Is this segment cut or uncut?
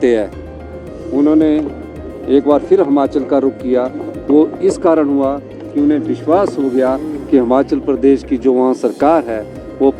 uncut